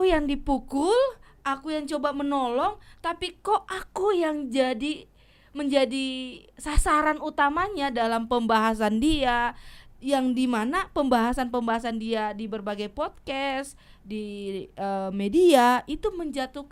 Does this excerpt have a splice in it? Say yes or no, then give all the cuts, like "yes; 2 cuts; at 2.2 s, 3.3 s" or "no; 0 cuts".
no; 0 cuts